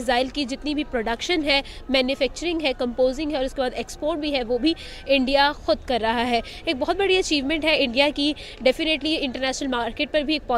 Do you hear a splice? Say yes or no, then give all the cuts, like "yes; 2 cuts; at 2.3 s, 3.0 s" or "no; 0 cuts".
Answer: no; 0 cuts